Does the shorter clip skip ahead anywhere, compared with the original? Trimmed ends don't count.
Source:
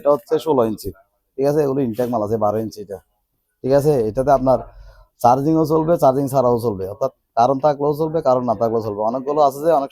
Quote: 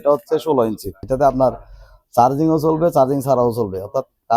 yes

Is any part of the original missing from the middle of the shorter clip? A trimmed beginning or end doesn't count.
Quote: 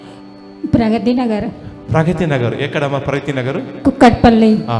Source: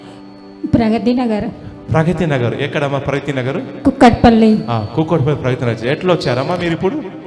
no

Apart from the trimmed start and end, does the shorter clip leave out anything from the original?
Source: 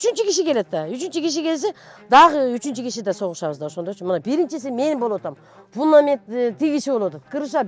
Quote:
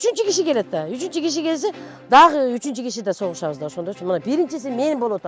no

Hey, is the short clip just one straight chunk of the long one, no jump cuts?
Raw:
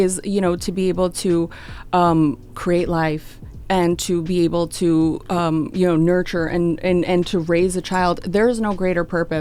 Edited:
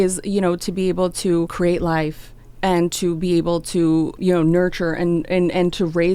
no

